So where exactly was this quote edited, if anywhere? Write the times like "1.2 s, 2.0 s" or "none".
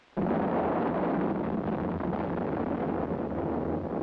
1.5 s